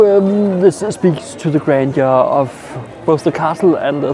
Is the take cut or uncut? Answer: uncut